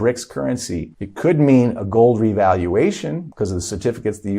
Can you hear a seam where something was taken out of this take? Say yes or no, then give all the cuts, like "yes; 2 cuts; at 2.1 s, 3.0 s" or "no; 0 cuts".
yes; 2 cuts; at 1.0 s, 3.2 s